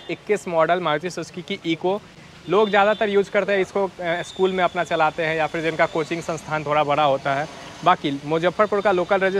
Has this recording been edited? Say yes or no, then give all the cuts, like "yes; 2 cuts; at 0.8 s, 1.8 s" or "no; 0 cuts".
no; 0 cuts